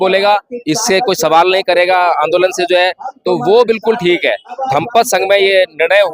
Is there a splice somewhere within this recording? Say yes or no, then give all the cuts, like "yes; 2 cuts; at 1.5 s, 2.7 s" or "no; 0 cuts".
yes; 1 cut; at 4.5 s